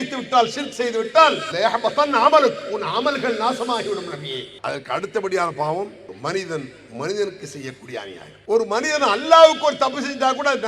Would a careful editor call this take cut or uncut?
cut